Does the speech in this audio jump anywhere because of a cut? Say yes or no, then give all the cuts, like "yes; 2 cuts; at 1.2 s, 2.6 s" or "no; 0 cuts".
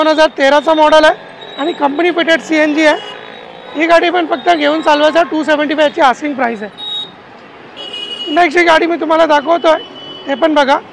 no; 0 cuts